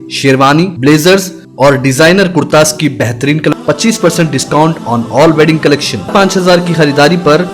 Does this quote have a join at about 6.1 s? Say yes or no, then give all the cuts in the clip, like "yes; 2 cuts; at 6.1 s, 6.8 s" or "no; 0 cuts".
yes; 2 cuts; at 3.5 s, 6.1 s